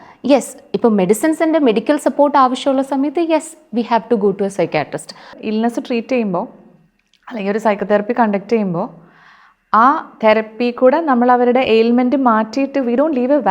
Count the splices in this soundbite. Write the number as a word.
one